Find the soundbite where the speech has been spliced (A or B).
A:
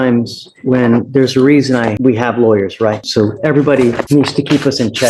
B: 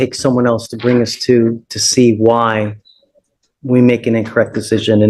A